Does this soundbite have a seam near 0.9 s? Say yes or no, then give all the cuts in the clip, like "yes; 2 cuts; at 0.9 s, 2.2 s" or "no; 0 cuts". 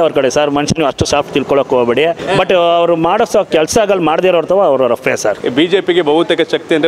no; 2 cuts; at 2.2 s, 5.4 s